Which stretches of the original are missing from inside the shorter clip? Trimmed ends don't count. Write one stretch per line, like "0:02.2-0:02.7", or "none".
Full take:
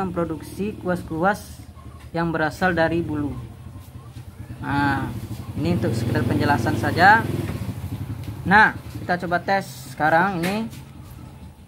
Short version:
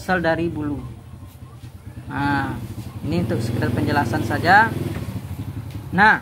none